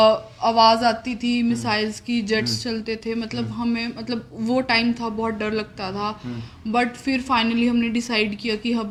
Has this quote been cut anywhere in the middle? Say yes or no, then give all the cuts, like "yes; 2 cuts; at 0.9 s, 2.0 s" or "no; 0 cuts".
no; 0 cuts